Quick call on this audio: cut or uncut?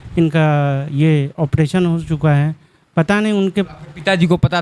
uncut